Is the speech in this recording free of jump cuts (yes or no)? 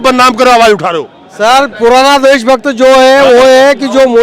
yes